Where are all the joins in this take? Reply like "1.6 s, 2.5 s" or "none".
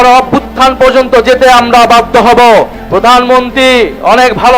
2.8 s

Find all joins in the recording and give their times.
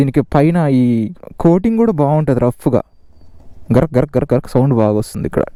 none

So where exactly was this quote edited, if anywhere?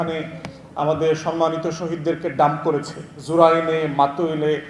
none

